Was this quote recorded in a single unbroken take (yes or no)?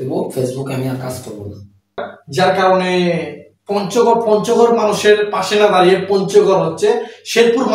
no